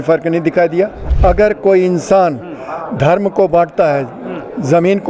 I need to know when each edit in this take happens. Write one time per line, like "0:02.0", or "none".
0:01.0

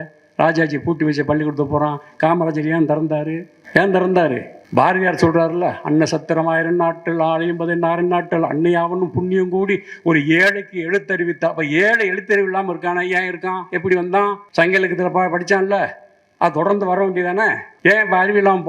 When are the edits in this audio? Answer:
0:03.5
0:04.5
0:14.4
0:17.6

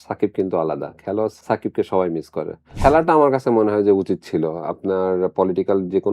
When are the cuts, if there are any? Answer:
0:01.4
0:02.7

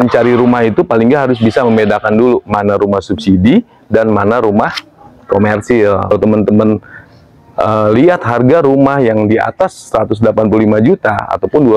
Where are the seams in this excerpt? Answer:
0:06.1

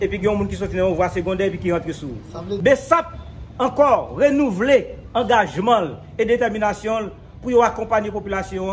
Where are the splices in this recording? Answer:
0:02.6

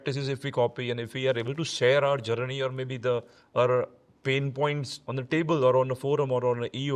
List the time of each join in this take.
0:04.9

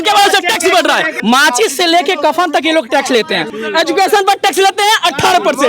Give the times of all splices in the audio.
0:01.1
0:03.5

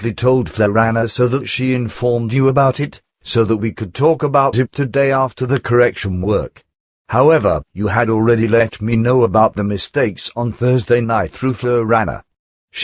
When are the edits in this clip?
0:03.0

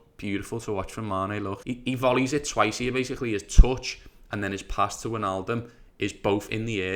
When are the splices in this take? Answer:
0:01.6

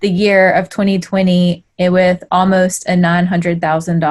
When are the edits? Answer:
none

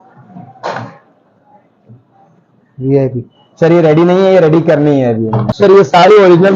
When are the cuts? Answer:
0:05.4

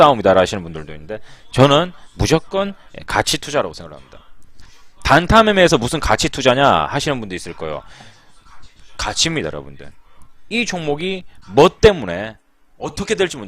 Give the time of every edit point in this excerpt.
none

